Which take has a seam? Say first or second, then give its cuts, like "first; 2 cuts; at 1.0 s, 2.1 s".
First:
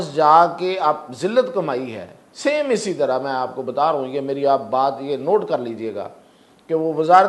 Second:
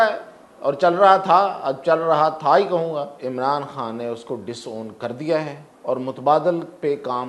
second; 2 cuts; at 3.1 s, 5.7 s